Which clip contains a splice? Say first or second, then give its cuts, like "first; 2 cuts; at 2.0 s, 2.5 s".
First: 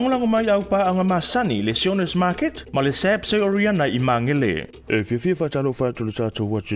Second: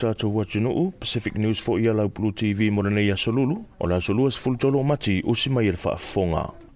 first; 1 cut; at 4.5 s